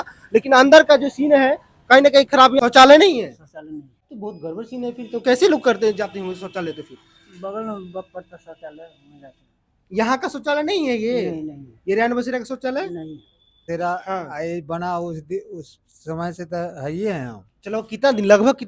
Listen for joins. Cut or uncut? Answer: cut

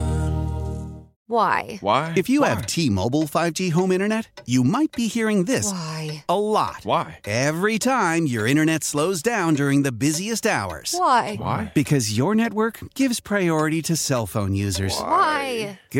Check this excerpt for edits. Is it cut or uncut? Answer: uncut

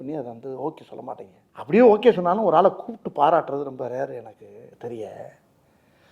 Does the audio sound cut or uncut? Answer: cut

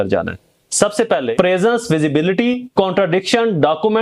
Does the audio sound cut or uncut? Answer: cut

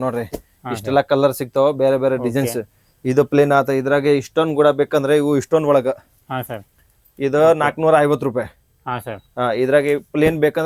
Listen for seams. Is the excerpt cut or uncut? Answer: uncut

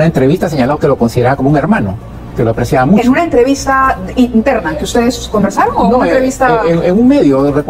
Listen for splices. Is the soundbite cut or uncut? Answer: uncut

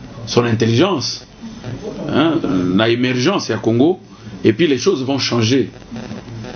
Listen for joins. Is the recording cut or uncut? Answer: uncut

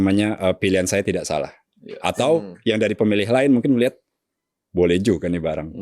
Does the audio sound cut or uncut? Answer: uncut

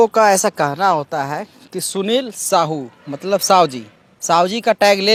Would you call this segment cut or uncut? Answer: uncut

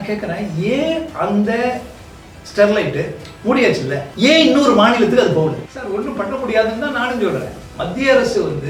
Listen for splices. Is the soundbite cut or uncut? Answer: cut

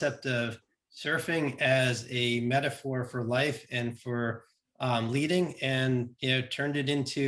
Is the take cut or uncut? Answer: uncut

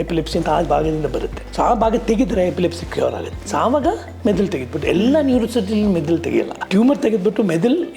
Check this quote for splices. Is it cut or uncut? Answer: cut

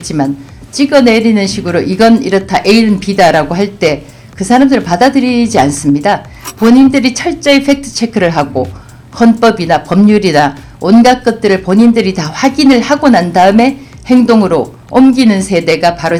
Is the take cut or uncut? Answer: uncut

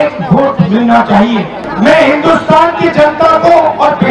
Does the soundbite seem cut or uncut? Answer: cut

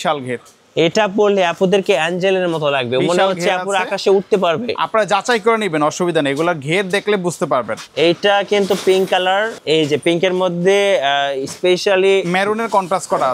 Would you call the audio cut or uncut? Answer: cut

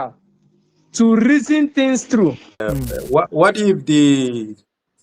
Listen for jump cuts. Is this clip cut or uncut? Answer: cut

